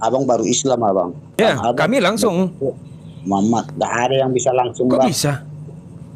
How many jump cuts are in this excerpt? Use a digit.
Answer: 1